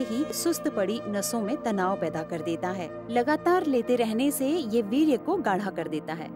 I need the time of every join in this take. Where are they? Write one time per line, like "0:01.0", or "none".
none